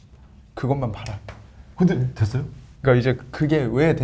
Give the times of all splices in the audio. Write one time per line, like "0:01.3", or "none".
none